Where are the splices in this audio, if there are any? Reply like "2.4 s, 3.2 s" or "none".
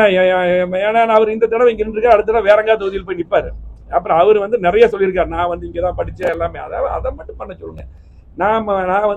none

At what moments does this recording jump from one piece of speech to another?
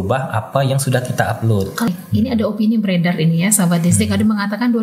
1.9 s

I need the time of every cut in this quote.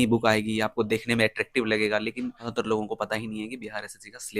2.5 s

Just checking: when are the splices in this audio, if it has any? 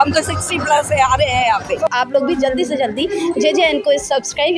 1.9 s

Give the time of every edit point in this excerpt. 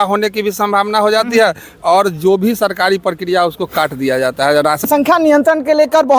4.9 s

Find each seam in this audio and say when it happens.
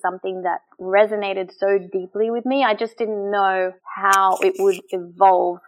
3.9 s

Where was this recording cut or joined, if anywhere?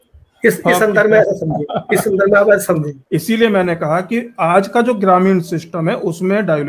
2.9 s

